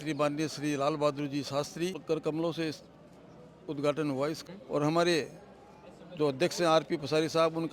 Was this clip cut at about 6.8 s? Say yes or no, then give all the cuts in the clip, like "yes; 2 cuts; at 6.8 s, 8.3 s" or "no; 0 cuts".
no; 2 cuts; at 2.0 s, 4.4 s